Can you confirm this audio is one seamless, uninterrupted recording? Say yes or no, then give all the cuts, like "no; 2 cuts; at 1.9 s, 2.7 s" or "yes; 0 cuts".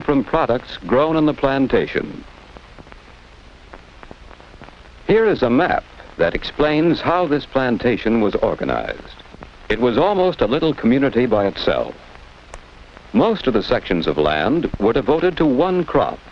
yes; 0 cuts